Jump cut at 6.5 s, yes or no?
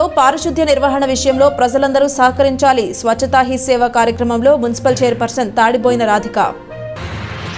no